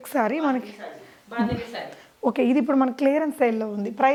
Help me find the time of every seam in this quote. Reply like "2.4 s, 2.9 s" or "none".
none